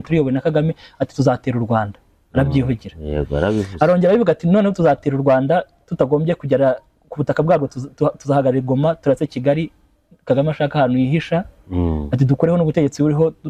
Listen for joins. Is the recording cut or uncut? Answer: uncut